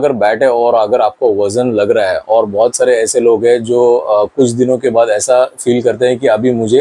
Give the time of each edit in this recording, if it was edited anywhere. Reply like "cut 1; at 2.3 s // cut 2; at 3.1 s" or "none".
none